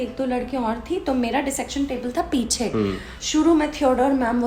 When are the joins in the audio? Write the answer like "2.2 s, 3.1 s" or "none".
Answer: none